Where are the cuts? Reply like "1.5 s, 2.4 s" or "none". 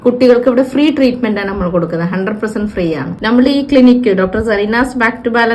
3.2 s